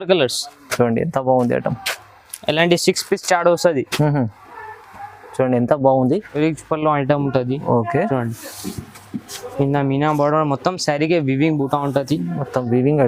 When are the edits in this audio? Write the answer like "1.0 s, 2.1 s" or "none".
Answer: 6.3 s